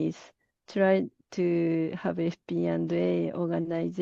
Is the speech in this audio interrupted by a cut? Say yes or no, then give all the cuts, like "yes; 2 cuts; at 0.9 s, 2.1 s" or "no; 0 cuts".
no; 0 cuts